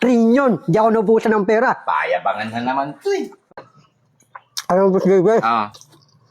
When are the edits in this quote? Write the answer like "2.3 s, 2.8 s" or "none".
3.4 s